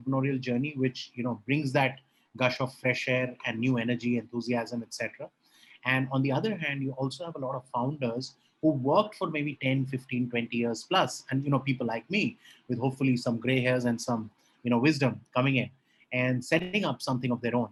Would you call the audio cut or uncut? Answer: uncut